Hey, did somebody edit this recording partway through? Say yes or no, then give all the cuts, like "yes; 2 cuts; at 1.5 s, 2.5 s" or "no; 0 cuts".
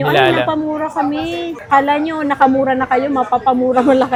no; 0 cuts